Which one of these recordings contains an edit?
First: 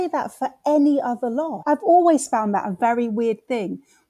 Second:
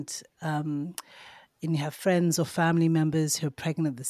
first; 1 cut; at 1.6 s

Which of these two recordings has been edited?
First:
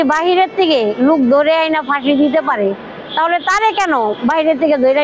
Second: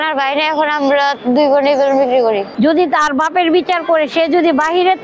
second; 1 cut; at 2.5 s

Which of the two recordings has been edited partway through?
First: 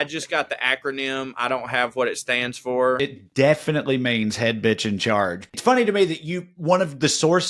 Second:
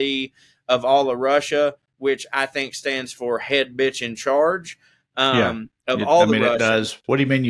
first; 2 cuts; at 3.0 s, 5.6 s

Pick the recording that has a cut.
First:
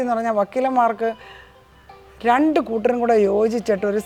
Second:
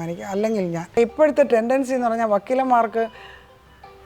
second; 1 cut; at 1.0 s

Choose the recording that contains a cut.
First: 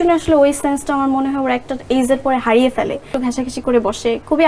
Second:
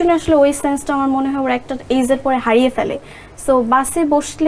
first; 1 cut; at 3.1 s

